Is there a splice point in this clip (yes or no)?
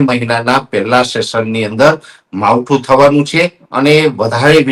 no